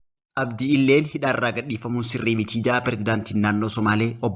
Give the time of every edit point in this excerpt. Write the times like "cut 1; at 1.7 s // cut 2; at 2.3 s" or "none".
none